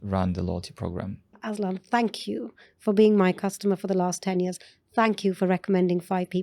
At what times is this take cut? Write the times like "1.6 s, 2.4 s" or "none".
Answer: 1.4 s

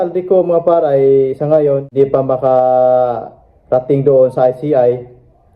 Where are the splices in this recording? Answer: 1.9 s

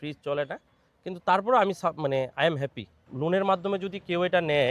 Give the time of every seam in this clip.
3.0 s

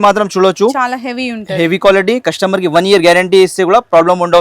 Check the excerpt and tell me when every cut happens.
none

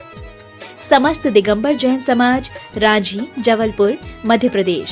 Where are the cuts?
1.9 s

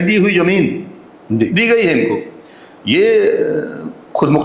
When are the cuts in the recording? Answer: none

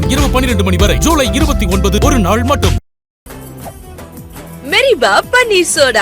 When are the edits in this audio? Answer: 3.3 s

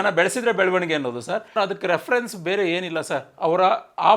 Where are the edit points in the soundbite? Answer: 1.6 s

